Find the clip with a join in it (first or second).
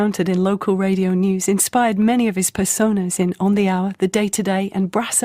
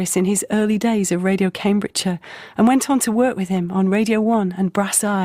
first